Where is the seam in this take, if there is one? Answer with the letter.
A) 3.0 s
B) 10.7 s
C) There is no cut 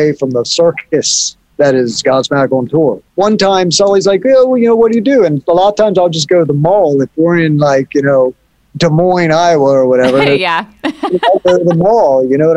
A